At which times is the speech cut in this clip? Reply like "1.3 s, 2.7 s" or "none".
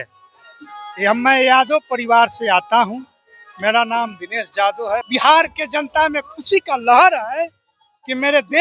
5.1 s